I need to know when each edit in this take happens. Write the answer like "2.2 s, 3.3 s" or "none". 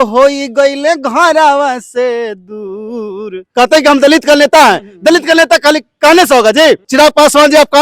3.4 s, 6.9 s

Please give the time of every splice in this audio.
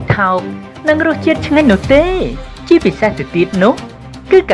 2.5 s

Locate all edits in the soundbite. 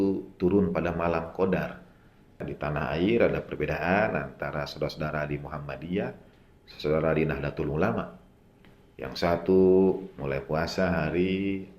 2.5 s

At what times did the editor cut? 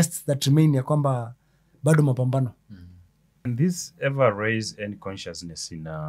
3.5 s

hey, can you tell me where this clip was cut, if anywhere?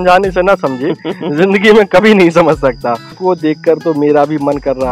3.2 s

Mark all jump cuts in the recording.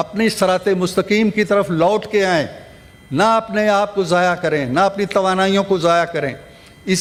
none

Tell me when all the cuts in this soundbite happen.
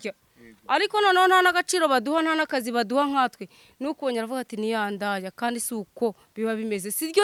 none

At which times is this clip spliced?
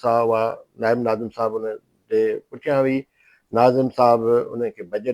none

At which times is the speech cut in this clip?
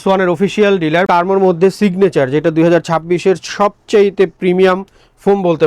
1.1 s

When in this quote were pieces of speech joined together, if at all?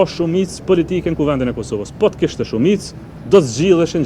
none

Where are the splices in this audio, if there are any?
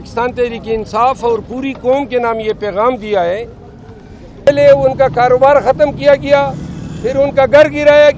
4.5 s

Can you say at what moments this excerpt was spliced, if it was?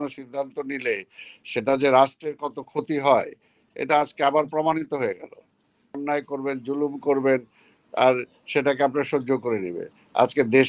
6.0 s

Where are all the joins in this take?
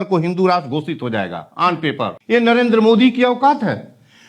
2.2 s

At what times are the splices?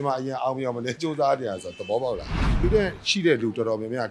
2.6 s

